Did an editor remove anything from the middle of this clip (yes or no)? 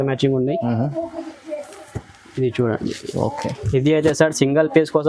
no